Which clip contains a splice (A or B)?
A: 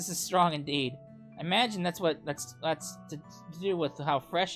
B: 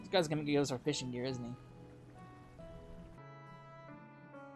B